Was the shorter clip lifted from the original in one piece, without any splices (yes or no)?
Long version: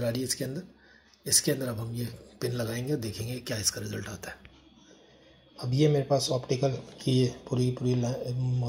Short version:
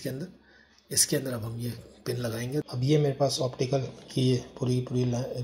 no